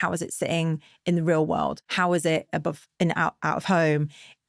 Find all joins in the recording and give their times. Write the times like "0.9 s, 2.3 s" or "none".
1.8 s